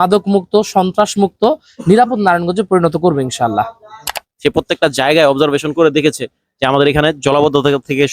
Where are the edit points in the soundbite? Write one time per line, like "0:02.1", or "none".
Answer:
0:04.0